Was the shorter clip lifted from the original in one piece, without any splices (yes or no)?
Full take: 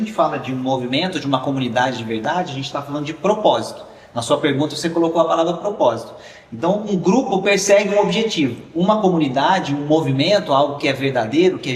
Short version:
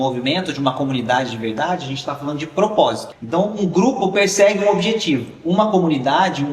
no